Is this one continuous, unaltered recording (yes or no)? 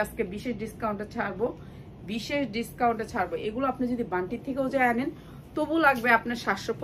yes